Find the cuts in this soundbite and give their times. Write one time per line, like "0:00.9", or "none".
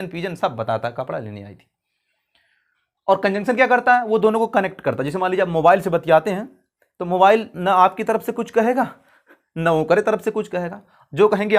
none